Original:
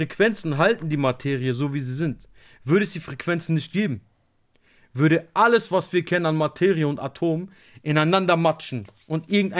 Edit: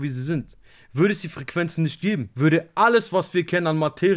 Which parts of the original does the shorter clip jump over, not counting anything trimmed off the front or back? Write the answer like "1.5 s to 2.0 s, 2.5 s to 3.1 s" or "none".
4.0 s to 4.9 s